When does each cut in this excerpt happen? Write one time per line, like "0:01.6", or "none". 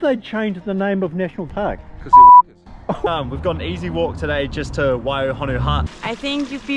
0:01.5
0:02.7
0:05.9